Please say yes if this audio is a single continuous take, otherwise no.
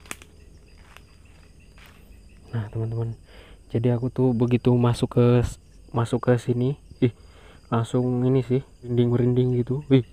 no